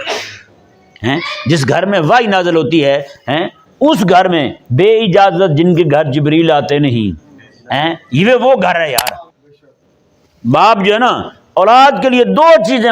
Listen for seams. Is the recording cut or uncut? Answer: cut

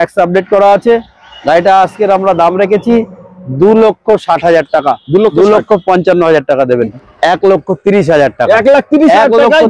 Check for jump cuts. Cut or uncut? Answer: cut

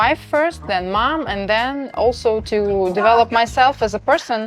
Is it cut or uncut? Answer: cut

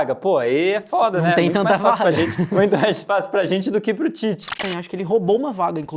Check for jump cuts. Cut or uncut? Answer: cut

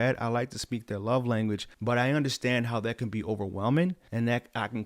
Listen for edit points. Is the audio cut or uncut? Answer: cut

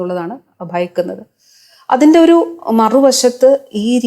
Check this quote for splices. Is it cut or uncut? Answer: uncut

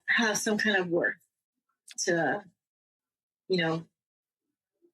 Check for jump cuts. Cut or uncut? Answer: cut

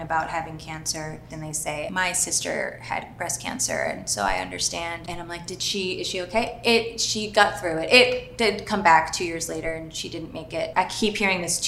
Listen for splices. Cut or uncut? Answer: cut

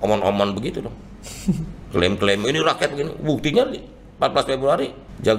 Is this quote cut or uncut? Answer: uncut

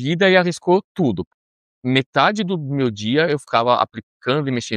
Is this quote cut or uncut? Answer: cut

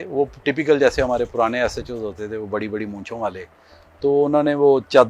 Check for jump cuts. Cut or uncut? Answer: uncut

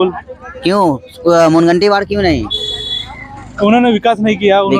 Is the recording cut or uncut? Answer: uncut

